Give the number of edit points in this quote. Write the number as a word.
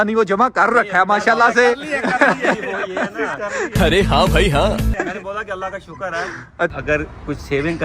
one